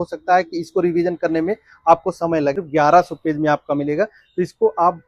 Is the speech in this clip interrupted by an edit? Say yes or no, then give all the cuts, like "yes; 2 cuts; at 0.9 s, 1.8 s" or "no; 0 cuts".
yes; 1 cut; at 2.6 s